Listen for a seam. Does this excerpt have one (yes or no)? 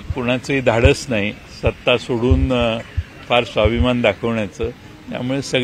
no